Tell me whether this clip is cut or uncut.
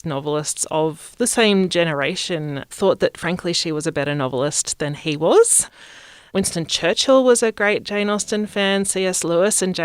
cut